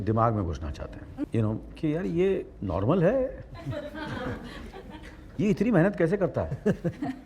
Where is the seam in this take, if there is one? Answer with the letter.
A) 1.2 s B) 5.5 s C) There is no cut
A